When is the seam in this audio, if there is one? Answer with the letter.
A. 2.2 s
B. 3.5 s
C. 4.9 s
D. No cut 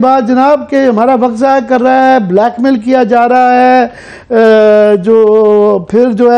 D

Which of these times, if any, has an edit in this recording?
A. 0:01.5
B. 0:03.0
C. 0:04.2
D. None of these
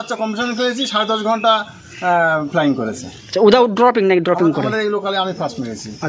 D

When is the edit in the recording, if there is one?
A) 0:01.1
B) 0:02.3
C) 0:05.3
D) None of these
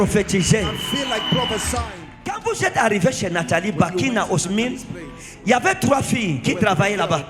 B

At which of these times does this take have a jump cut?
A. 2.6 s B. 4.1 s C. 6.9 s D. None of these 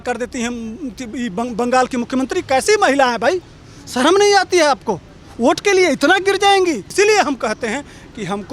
C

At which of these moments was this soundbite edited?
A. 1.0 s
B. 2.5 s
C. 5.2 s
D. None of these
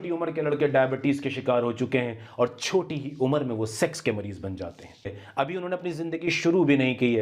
C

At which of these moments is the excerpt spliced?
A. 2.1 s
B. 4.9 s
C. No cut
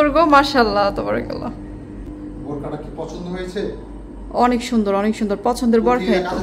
A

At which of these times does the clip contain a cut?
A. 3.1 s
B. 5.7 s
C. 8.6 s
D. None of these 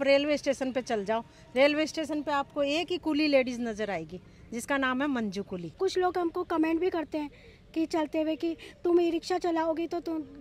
B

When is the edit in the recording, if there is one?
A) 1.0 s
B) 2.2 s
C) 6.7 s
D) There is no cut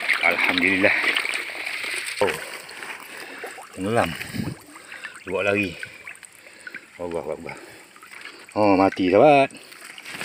B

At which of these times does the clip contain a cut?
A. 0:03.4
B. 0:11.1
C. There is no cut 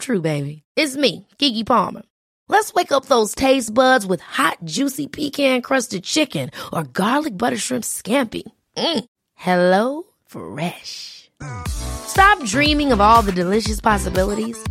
C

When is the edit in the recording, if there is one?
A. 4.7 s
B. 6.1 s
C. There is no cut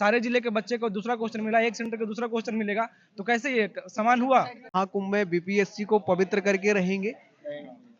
A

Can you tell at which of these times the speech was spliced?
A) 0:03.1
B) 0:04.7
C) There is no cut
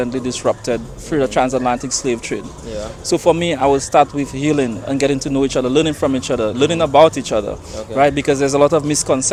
C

